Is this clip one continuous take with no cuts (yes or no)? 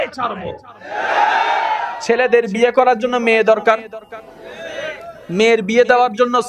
no